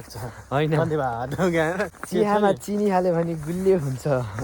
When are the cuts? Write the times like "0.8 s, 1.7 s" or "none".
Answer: 2.0 s